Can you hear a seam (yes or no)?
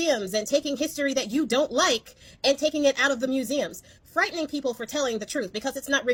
no